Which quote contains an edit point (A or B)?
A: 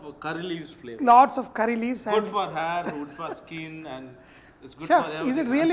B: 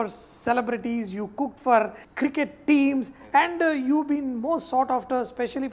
B